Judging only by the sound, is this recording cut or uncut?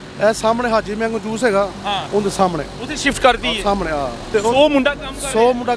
cut